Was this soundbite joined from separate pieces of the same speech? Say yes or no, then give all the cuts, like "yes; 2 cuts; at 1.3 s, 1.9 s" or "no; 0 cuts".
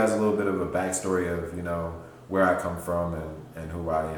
no; 0 cuts